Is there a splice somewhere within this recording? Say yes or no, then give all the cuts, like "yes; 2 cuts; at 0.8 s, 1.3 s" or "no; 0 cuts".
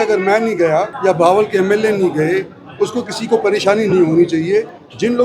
yes; 1 cut; at 0.9 s